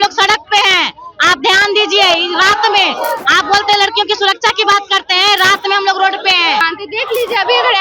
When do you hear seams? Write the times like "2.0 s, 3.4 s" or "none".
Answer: 6.6 s